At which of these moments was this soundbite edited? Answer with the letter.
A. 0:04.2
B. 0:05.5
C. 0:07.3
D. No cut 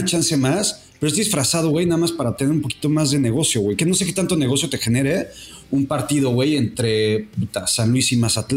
D